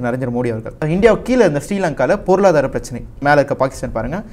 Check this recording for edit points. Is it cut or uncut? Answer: cut